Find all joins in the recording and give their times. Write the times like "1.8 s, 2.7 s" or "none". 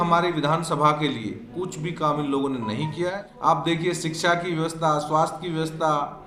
3.3 s